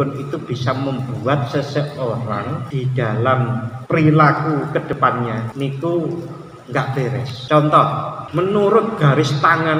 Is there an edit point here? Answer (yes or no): yes